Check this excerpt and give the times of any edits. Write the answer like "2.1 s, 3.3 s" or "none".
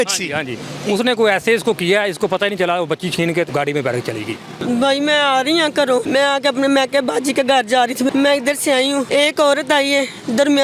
3.5 s, 4.5 s, 6.1 s, 8.1 s, 9.1 s